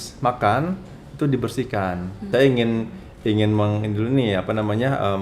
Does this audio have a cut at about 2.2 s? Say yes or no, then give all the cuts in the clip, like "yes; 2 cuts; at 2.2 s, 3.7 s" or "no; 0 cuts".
yes; 1 cut; at 2.2 s